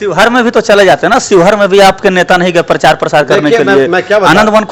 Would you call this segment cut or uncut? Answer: uncut